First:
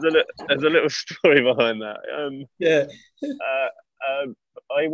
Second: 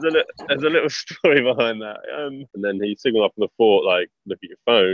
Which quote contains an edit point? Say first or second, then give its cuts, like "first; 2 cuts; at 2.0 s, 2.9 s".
second; 1 cut; at 2.4 s